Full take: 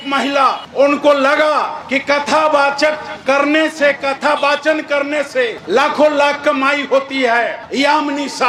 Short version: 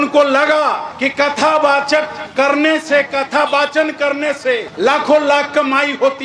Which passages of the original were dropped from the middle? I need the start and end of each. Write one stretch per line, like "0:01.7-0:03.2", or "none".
none